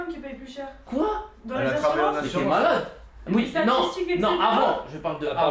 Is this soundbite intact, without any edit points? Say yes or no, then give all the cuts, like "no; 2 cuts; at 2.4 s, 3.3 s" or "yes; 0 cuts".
yes; 0 cuts